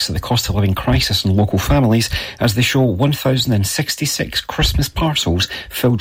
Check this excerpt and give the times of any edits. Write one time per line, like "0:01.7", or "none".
none